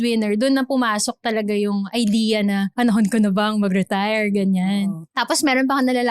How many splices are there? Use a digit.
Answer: 2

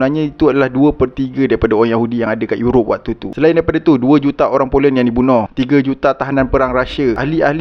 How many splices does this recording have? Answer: 1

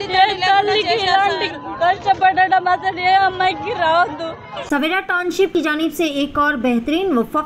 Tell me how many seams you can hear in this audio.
1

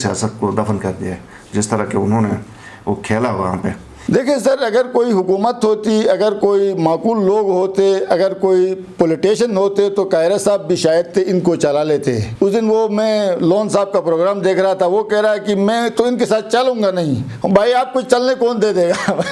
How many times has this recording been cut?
2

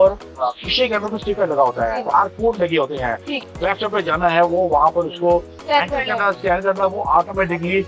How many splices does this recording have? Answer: 2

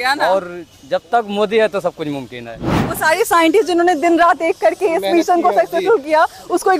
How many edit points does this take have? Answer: 1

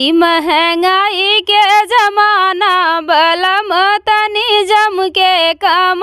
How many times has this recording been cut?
0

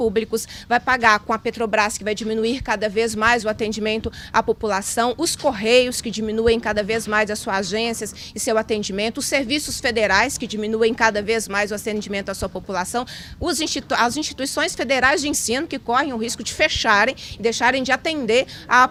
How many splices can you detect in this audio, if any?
0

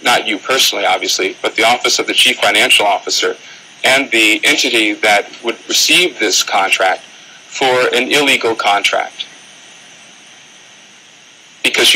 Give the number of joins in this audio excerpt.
0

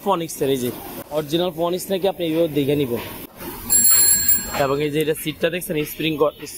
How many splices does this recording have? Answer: 2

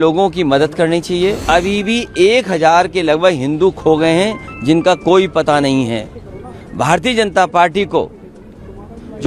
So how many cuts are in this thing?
1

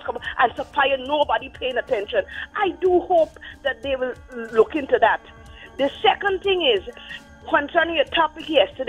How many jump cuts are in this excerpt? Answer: 0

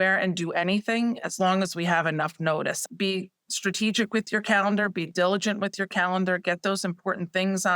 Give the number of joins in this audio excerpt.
2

